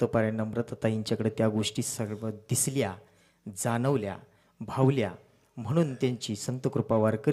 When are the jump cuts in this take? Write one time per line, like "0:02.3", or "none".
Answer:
none